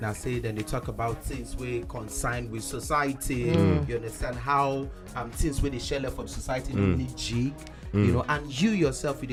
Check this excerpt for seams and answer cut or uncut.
uncut